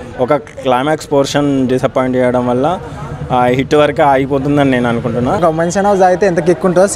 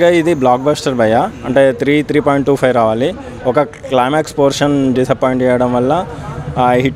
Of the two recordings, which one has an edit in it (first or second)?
first